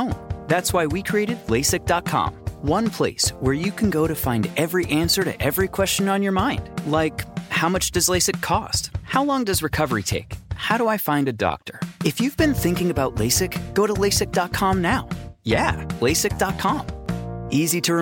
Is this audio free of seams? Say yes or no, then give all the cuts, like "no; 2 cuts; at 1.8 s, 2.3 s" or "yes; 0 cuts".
yes; 0 cuts